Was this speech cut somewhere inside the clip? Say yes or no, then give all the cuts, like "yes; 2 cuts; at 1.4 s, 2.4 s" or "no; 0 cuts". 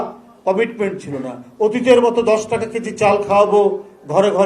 no; 0 cuts